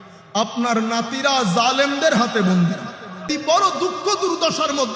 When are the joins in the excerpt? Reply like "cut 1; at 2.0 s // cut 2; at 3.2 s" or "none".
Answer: cut 1; at 3.2 s